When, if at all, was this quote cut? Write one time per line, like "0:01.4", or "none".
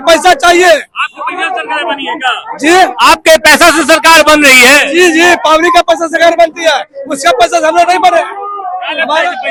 none